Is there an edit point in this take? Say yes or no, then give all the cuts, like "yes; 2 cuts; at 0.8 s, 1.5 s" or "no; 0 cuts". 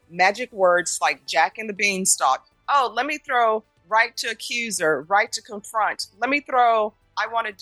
no; 0 cuts